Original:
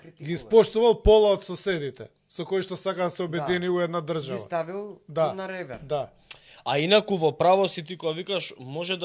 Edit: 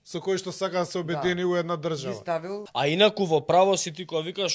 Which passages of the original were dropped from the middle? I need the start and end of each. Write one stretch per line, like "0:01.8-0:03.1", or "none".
0:04.8-0:06.5